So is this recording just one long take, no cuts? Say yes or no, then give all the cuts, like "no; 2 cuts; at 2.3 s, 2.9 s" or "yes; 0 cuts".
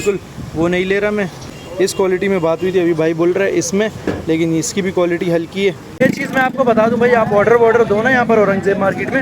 no; 2 cuts; at 1.5 s, 6.0 s